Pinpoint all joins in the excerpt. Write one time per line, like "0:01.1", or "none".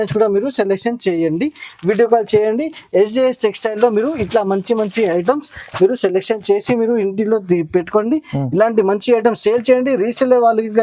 none